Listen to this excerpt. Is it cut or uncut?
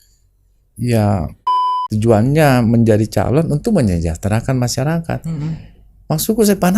cut